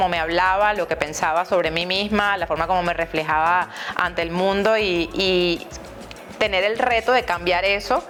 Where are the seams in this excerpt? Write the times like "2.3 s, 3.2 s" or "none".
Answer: none